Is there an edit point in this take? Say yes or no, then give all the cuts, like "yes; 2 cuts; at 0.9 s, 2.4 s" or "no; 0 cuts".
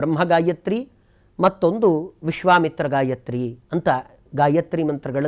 no; 0 cuts